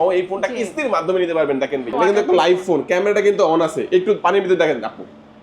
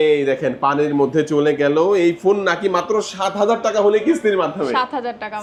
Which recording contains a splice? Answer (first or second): first